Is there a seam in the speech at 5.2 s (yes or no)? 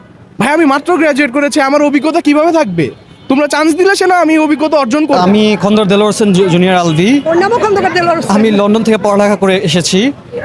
yes